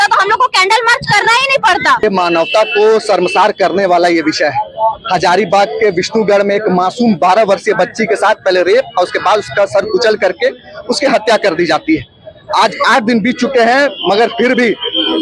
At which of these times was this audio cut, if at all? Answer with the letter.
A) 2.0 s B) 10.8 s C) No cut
A